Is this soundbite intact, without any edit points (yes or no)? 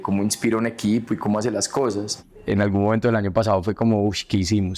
no